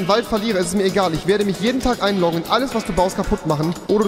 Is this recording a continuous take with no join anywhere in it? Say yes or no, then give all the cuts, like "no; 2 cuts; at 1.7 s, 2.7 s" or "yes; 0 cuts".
yes; 0 cuts